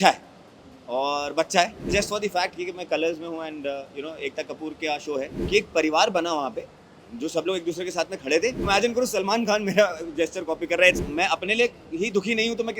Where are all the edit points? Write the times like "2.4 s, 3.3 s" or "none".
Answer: 1.9 s, 5.4 s, 8.7 s, 11.0 s